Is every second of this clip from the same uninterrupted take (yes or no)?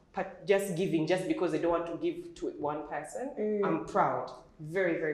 yes